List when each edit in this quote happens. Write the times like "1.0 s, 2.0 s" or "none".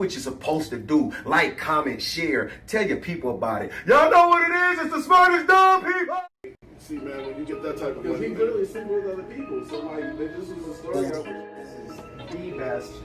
10.9 s